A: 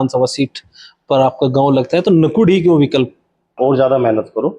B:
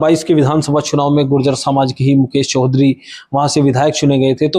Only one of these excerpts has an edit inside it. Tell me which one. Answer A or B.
A